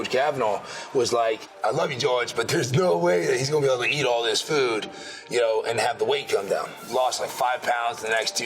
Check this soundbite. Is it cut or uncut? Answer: cut